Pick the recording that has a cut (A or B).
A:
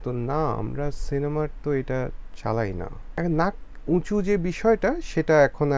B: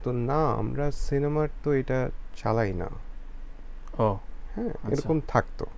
A